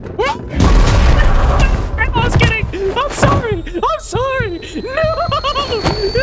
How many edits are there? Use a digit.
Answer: 0